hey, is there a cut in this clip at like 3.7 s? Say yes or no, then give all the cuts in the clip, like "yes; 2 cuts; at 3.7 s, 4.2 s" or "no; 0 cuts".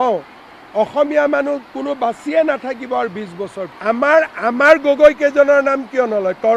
yes; 1 cut; at 3.7 s